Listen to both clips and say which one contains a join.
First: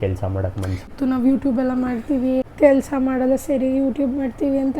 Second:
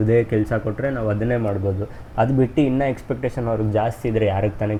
first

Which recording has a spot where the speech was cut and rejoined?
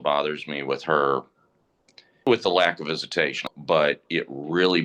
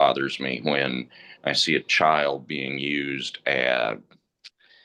first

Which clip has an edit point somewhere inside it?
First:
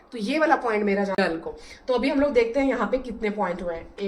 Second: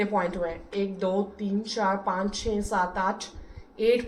first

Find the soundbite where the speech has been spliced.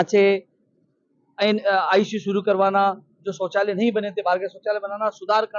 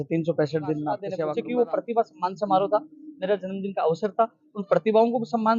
second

